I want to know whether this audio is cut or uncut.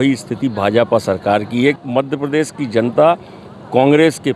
cut